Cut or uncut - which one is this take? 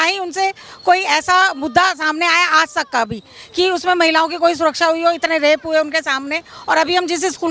uncut